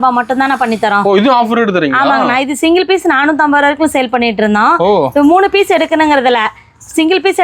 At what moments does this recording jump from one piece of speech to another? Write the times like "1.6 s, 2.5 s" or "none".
none